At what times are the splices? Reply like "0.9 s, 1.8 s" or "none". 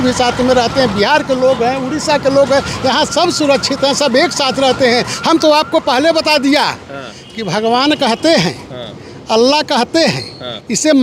none